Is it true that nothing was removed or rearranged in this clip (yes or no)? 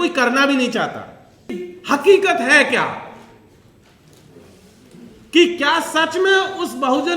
no